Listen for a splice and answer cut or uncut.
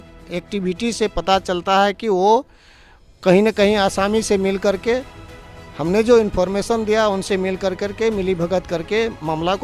uncut